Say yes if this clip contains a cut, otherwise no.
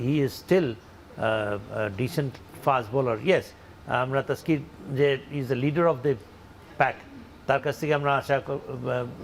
yes